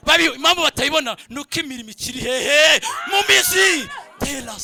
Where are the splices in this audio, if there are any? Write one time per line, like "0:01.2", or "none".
none